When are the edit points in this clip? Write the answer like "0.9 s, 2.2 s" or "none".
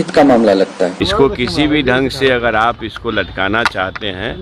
1.0 s

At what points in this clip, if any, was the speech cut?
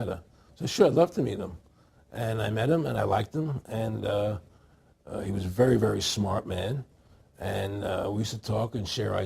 1.8 s

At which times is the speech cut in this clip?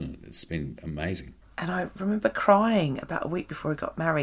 1.4 s

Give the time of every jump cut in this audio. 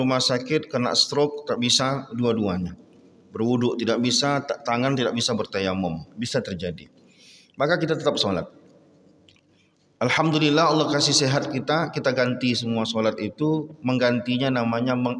none

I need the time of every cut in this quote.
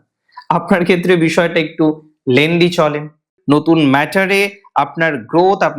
3.3 s

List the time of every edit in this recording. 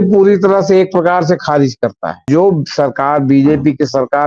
2.2 s

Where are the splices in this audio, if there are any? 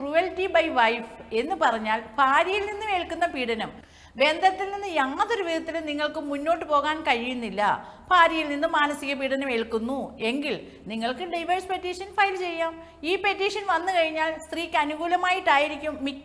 3.9 s

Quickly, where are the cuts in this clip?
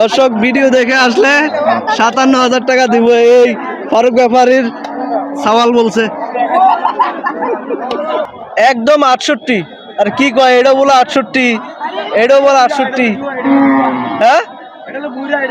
8.2 s

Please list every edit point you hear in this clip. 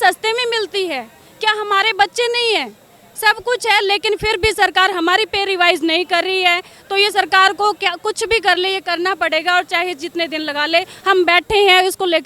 none

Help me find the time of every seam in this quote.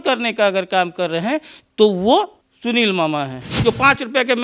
2.4 s, 3.5 s

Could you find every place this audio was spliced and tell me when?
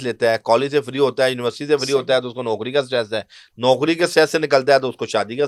none

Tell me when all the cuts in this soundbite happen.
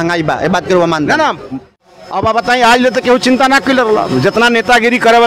1.4 s

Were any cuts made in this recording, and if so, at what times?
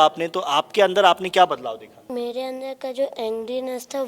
2.1 s

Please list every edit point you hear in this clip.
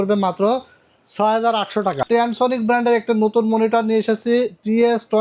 2.0 s

